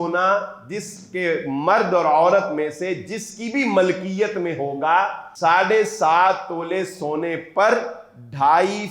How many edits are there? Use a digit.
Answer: 1